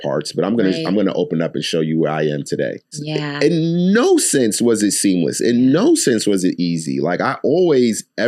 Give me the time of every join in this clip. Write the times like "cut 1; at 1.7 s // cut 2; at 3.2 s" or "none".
cut 1; at 3.0 s